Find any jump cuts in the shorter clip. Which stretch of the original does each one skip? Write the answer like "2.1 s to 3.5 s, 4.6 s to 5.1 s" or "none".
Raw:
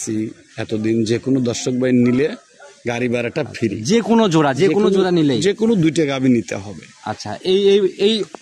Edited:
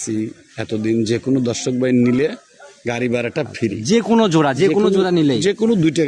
none